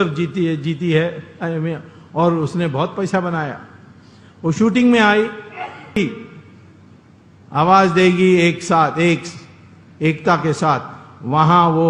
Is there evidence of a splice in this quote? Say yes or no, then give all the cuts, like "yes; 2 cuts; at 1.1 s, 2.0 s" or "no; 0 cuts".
yes; 1 cut; at 6.0 s